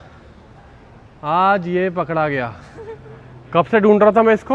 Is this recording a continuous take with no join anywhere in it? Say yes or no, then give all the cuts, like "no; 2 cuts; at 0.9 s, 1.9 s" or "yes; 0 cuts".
yes; 0 cuts